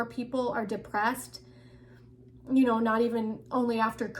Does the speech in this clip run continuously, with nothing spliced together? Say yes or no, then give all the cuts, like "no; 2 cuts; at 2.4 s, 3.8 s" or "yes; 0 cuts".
yes; 0 cuts